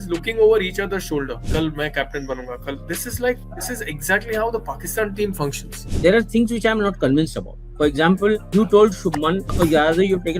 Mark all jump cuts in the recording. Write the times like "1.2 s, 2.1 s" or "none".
1.4 s, 5.8 s, 8.4 s, 9.5 s